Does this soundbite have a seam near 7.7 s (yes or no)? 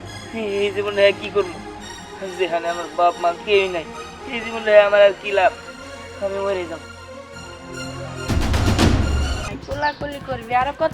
no